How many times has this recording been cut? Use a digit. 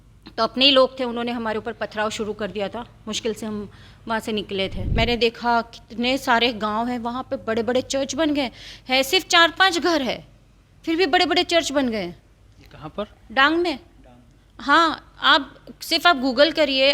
1